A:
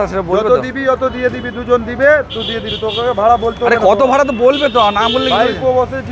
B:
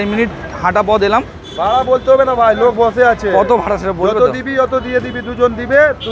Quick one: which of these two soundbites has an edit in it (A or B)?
B